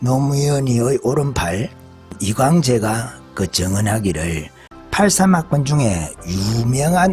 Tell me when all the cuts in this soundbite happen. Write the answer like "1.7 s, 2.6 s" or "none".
4.8 s